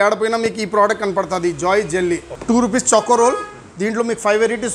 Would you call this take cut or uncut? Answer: cut